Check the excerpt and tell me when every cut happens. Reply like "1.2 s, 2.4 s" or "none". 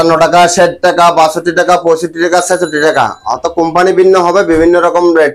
none

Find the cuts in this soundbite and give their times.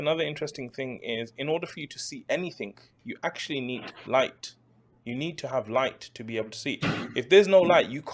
none

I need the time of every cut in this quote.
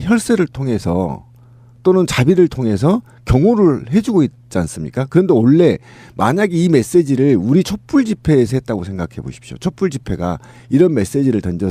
4.2 s

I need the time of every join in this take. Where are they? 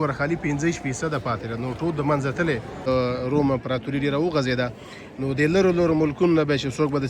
2.8 s

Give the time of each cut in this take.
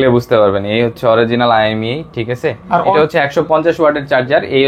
2.9 s

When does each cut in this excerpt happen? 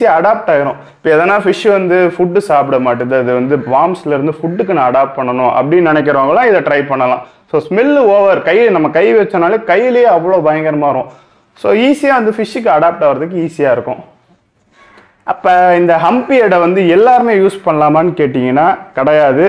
none

